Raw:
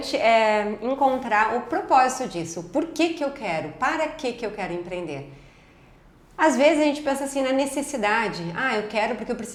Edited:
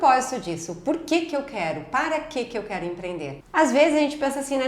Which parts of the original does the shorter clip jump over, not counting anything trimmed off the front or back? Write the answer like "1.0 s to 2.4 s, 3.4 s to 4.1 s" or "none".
5.3 s to 6.2 s